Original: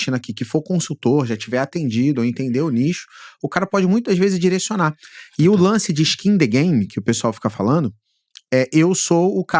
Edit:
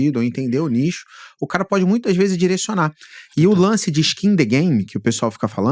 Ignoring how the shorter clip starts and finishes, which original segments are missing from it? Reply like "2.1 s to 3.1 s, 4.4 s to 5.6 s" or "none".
none